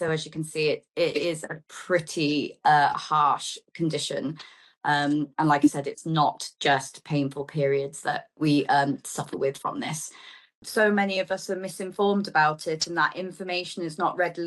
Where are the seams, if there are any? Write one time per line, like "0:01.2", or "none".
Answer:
0:10.6